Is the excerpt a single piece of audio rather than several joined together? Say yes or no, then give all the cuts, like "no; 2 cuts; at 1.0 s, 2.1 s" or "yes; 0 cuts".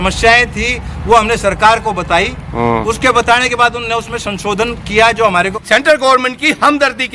no; 1 cut; at 5.5 s